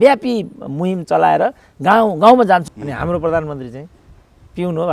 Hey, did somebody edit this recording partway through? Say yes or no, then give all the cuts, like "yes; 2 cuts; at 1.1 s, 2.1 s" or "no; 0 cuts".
yes; 1 cut; at 2.7 s